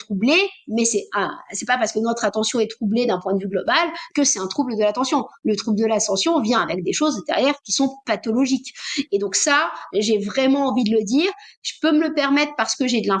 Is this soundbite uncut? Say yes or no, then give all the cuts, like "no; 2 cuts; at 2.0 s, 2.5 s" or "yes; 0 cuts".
yes; 0 cuts